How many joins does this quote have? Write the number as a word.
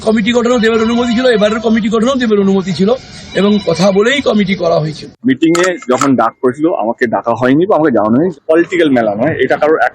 two